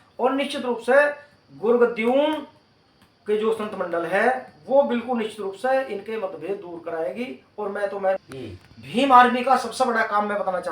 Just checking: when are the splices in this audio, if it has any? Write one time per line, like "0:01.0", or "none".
0:08.2